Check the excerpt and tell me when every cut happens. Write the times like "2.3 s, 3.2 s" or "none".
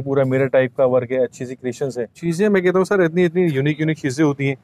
2.1 s